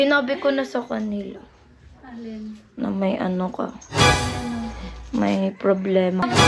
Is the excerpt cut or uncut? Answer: uncut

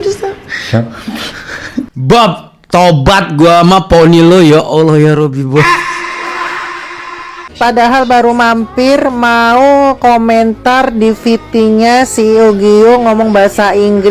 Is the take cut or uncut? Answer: cut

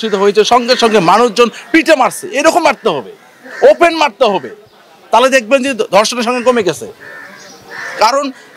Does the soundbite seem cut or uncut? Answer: uncut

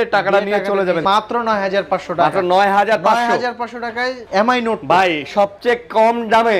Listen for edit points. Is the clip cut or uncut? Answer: cut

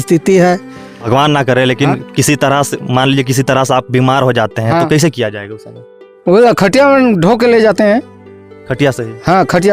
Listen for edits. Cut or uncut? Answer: cut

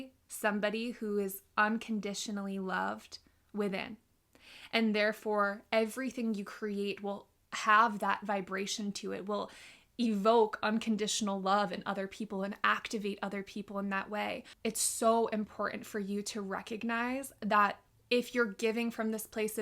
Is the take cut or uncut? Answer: cut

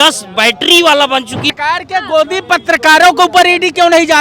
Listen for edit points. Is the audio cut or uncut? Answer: cut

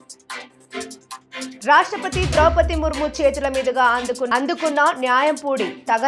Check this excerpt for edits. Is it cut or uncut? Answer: uncut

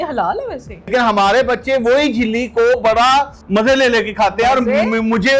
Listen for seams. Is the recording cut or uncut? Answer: cut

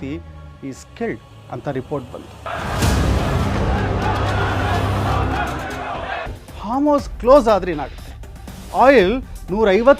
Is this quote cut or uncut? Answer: cut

